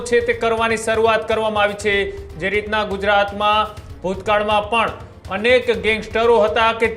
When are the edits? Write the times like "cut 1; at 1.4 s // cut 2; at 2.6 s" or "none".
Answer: none